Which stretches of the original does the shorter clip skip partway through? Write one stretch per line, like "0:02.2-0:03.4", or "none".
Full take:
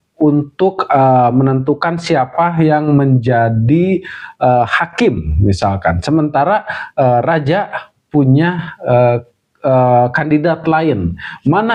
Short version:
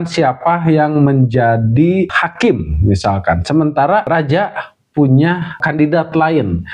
0:04.2-0:04.8
0:06.6-0:07.2
0:08.8-0:10.1